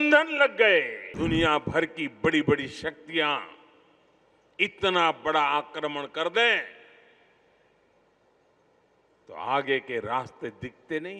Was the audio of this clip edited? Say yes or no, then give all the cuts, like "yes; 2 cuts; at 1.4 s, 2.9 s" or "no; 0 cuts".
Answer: yes; 1 cut; at 1.0 s